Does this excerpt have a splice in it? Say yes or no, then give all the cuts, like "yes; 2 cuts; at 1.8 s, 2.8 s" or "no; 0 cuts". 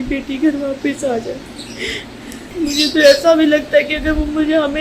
yes; 1 cut; at 2.4 s